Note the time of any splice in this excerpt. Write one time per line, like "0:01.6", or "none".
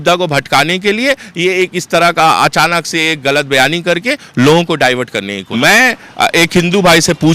0:05.4

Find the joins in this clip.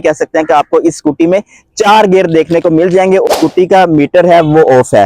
0:03.3

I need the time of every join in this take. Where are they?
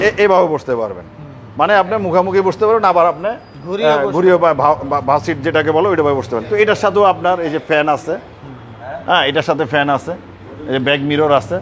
none

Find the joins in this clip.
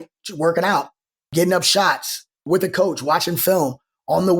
0:01.3
0:02.5

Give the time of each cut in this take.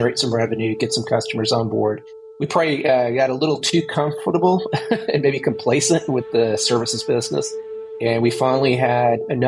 0:02.3
0:07.9

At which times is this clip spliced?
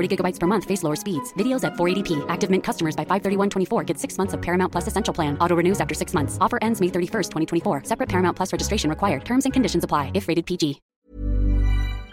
0:10.9

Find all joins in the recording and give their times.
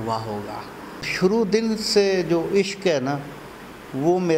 0:01.1

